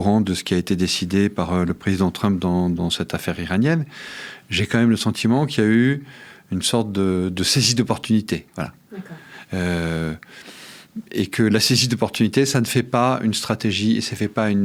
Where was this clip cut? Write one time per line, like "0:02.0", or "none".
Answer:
none